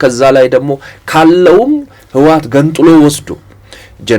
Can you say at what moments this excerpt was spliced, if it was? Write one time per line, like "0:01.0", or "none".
none